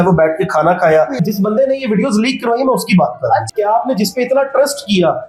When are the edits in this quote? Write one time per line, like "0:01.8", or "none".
0:01.2
0:03.5